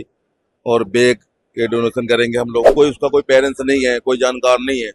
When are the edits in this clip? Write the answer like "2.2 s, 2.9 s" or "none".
2.7 s